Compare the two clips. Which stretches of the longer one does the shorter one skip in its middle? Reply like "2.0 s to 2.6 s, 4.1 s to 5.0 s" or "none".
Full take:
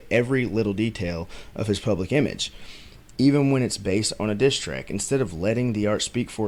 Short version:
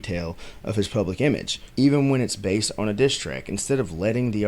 2.5 s to 3.0 s